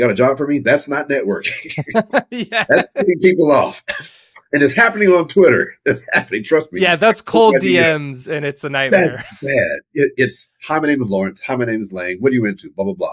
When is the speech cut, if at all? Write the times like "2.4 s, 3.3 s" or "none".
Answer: none